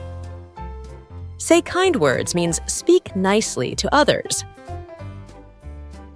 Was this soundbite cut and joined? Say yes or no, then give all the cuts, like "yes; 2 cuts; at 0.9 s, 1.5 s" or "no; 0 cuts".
yes; 2 cuts; at 0.9 s, 4.6 s